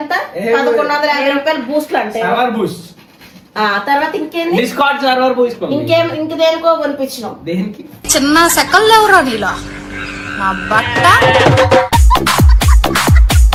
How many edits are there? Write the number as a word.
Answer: zero